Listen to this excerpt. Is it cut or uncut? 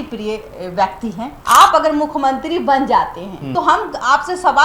cut